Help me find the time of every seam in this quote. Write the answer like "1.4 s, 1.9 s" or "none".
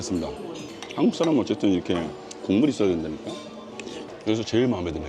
4.0 s